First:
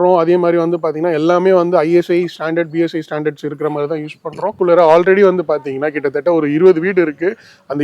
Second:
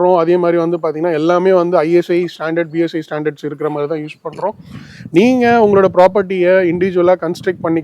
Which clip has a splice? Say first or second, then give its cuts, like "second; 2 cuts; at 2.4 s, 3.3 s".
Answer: first; 1 cut; at 4.5 s